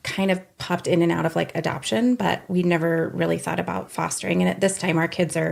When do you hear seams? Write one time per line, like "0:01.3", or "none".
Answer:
none